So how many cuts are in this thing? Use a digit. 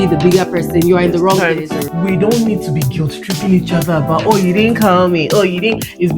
1